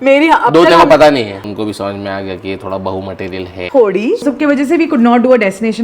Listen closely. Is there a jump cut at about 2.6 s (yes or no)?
no